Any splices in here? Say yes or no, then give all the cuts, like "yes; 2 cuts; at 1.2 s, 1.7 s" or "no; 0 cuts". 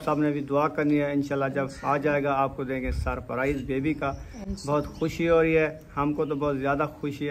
no; 0 cuts